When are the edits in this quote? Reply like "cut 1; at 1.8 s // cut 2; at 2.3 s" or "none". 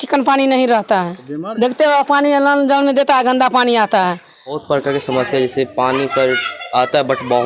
cut 1; at 4.6 s